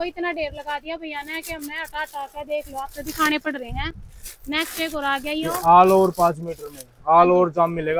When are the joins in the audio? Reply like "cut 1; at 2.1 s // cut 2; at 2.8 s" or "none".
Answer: none